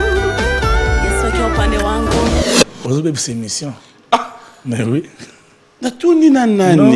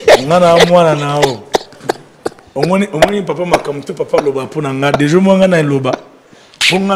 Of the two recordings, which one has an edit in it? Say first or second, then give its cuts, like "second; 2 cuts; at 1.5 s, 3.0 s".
first; 1 cut; at 2.4 s